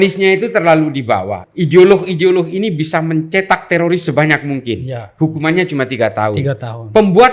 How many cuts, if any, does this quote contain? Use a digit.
1